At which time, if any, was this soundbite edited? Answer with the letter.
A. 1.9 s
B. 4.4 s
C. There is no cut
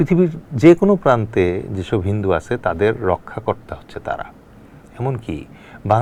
C